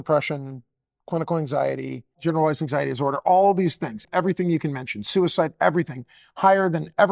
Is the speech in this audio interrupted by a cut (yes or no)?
yes